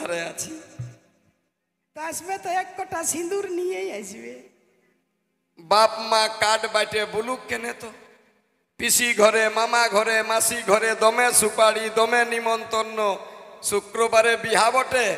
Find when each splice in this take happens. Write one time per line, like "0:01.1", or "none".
none